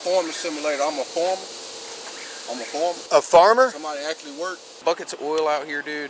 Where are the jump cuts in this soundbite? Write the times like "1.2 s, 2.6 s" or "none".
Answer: 3.0 s, 4.8 s